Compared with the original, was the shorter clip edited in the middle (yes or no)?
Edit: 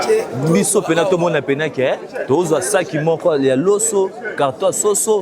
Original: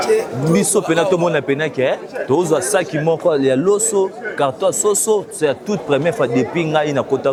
no